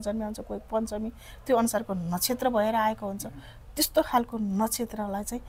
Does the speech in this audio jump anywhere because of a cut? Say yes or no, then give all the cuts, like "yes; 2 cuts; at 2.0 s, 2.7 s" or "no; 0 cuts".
no; 0 cuts